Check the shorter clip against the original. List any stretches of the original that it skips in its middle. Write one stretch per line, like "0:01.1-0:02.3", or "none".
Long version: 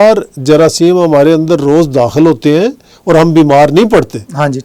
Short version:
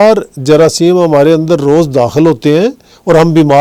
none